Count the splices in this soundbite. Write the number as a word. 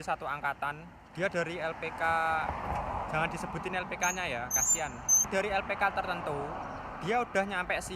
two